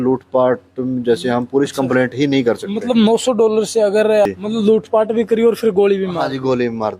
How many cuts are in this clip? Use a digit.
1